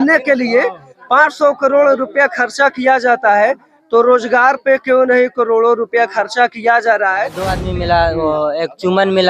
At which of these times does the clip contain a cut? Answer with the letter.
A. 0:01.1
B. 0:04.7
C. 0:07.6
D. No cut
C